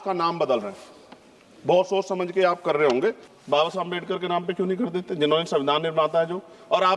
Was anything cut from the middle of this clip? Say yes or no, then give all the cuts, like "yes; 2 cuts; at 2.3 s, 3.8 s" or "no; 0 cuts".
yes; 1 cut; at 3.3 s